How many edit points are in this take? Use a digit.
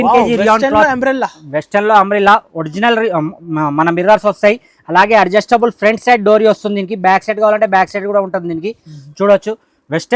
0